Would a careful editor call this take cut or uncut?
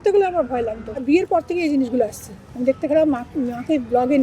cut